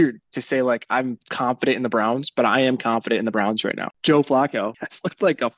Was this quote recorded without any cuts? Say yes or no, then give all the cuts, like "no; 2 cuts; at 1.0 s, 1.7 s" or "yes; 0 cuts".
no; 1 cut; at 3.9 s